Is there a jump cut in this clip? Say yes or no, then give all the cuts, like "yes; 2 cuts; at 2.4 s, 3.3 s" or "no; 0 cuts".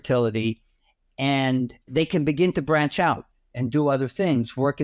yes; 1 cut; at 1.9 s